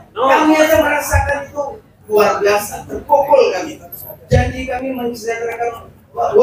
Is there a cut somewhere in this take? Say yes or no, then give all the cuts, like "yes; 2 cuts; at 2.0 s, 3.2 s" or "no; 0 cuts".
no; 0 cuts